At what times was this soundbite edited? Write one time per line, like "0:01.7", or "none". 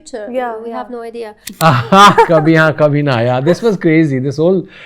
0:01.4